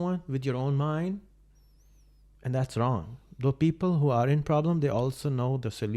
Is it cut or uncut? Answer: uncut